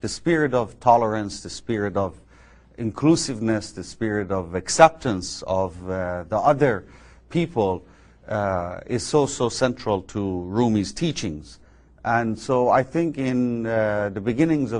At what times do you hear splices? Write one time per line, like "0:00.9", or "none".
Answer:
0:03.1